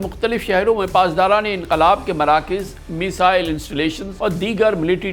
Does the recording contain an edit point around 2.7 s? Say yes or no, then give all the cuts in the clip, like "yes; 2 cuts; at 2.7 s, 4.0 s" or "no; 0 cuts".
no; 1 cut; at 4.1 s